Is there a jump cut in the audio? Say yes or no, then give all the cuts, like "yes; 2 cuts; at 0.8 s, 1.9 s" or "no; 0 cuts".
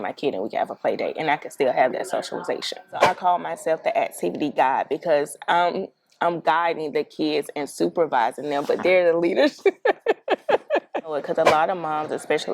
yes; 2 cuts; at 3.0 s, 11.1 s